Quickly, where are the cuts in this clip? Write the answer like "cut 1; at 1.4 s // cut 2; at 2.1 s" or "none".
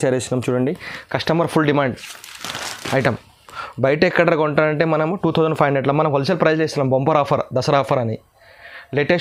none